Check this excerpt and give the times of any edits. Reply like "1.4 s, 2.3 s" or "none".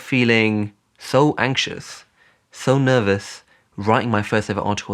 none